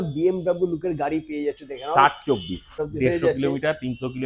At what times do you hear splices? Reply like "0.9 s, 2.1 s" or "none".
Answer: 2.8 s